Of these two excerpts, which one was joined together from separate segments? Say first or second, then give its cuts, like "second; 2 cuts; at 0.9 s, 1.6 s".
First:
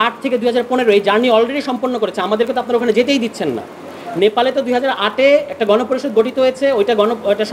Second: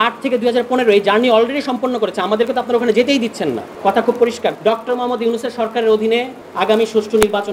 second; 3 cuts; at 3.7 s, 4.6 s, 6.4 s